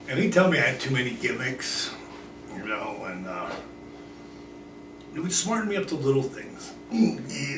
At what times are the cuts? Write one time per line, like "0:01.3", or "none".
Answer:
0:03.6

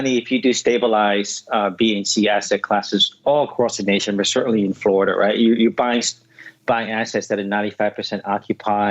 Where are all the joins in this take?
none

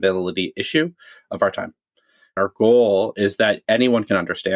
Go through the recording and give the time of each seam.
0:02.4

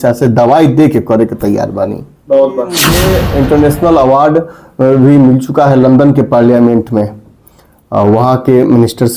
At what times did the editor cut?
0:02.9

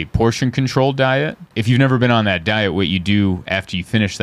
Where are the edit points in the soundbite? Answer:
0:01.5

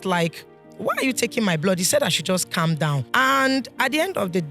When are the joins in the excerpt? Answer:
0:03.1

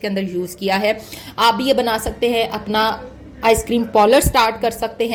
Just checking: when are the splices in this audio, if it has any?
none

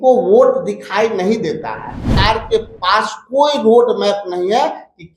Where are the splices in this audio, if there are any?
0:02.1

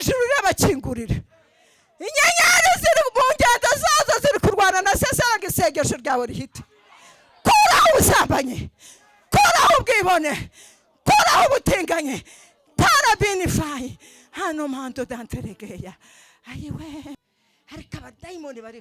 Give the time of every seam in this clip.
0:17.1

